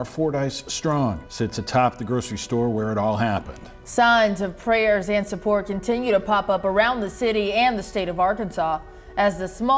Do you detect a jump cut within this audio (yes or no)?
no